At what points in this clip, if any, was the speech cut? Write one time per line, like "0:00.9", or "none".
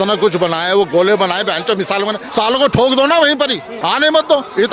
0:02.2
0:03.7